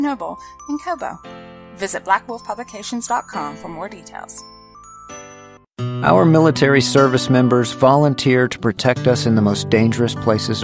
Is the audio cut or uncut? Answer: cut